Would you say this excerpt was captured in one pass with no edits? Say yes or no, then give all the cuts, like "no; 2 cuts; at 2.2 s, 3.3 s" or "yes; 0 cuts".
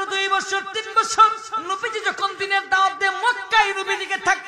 no; 1 cut; at 1.5 s